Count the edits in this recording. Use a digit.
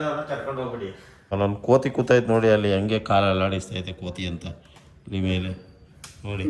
1